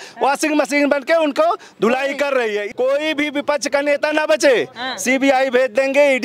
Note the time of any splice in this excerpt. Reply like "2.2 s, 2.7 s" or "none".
2.7 s